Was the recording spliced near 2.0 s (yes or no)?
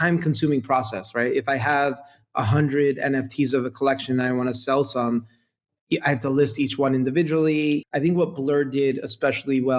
no